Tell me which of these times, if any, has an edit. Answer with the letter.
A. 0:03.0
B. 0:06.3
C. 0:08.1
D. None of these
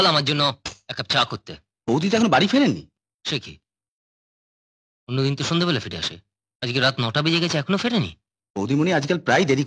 D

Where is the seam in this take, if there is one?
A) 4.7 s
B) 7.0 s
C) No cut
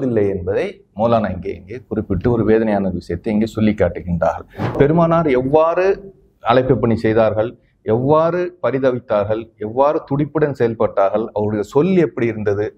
A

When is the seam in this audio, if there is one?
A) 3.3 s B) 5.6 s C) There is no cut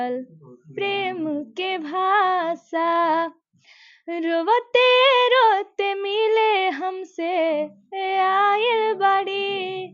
C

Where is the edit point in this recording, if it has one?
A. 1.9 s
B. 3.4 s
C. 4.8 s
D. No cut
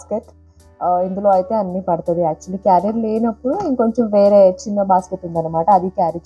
D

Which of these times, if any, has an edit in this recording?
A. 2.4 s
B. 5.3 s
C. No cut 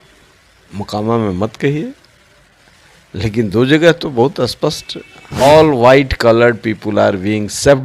B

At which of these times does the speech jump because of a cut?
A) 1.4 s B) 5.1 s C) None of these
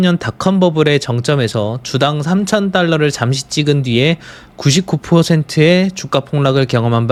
C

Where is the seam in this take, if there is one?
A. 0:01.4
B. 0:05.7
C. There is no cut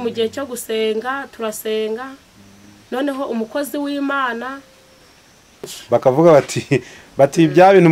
B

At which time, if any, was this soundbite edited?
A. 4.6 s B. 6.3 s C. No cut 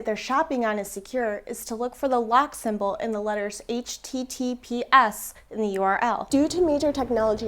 B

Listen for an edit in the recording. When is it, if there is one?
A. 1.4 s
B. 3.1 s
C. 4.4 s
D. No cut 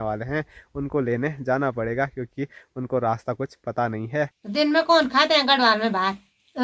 C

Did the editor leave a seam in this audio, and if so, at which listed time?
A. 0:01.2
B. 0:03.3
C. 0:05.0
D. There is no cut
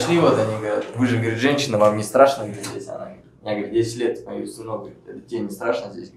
D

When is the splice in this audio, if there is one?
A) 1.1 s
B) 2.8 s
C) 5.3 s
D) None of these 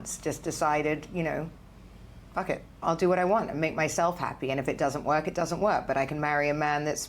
B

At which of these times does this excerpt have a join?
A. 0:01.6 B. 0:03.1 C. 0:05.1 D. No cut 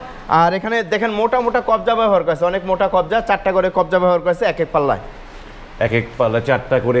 D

